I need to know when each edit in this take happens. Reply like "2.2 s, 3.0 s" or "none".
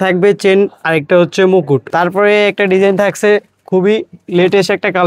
1.9 s